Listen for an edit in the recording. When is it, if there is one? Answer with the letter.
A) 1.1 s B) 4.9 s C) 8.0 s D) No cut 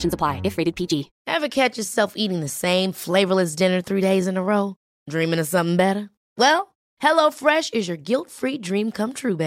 A